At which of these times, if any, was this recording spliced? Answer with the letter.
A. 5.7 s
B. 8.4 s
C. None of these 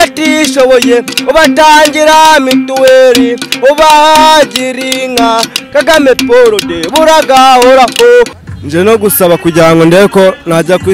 B